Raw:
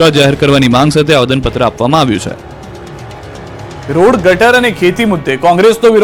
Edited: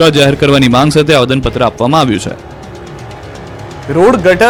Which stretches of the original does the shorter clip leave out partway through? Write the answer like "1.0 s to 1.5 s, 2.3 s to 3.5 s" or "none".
none

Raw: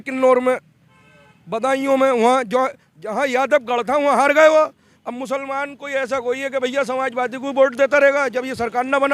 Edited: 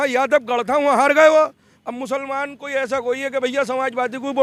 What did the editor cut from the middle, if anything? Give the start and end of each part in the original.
none

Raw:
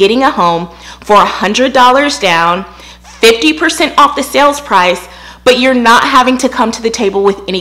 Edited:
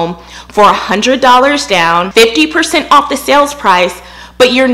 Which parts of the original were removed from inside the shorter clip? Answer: 2.6 s to 3.1 s

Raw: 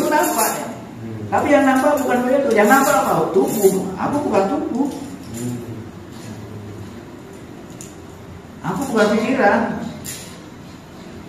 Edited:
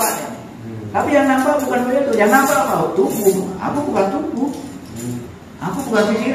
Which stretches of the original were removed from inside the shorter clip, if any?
5.8 s to 8.4 s

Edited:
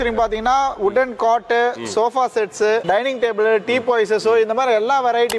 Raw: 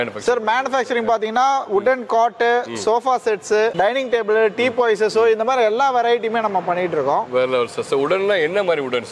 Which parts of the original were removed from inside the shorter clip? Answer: none

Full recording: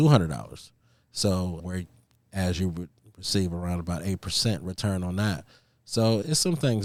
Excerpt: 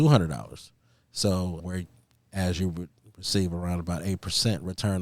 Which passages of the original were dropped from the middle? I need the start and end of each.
none

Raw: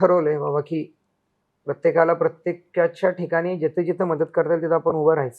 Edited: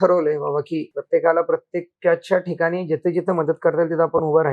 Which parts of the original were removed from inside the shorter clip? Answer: 0.9 s to 1.7 s

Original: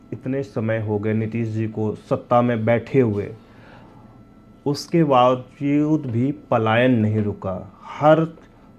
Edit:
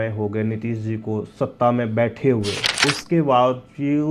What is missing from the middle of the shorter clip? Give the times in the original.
3.3 s to 4.5 s

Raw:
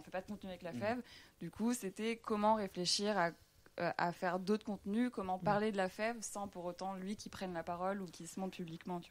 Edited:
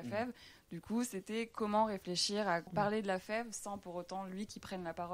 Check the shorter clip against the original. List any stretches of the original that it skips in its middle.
3.4 s to 5.4 s

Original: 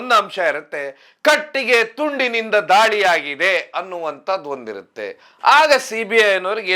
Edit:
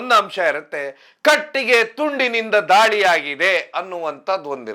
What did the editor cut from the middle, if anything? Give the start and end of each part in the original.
none

